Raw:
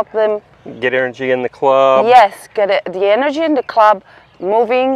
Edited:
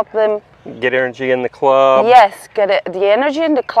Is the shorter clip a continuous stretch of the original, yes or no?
yes